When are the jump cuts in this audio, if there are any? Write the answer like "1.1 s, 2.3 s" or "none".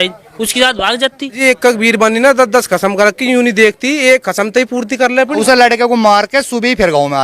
1.4 s, 5.4 s